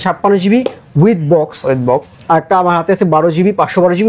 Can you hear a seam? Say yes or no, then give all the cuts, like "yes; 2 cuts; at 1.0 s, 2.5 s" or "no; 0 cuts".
no; 0 cuts